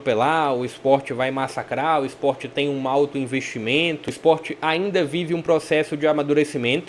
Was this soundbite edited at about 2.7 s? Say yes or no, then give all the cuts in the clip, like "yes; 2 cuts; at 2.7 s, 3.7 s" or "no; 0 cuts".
no; 1 cut; at 4.1 s